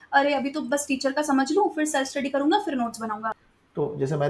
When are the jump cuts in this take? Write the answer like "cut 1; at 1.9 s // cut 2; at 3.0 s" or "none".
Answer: cut 1; at 3.3 s